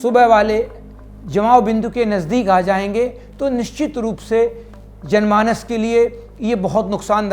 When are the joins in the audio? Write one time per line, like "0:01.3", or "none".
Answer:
0:04.9